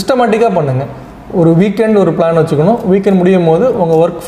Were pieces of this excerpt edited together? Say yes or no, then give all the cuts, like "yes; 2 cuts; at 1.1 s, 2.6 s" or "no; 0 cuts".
no; 0 cuts